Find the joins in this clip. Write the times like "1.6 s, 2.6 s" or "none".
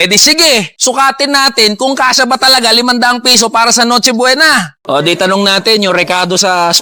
1.2 s